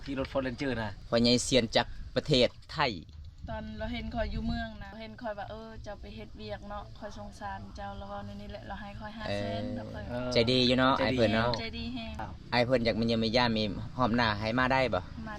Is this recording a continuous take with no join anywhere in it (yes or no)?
no